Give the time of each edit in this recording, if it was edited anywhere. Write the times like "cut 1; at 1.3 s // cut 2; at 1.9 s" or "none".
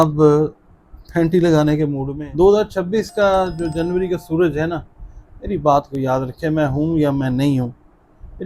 cut 1; at 2.1 s